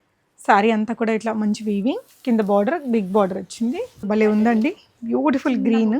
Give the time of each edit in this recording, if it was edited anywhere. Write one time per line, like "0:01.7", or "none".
0:04.0